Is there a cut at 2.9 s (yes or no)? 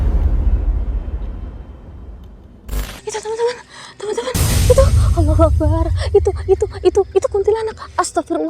yes